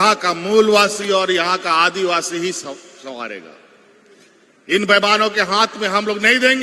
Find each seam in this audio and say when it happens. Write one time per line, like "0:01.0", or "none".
none